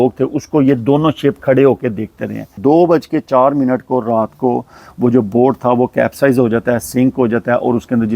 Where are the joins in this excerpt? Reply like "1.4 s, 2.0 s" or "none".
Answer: 2.5 s